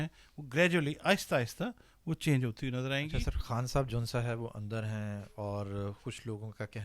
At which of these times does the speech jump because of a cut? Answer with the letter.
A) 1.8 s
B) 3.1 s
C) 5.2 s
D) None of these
B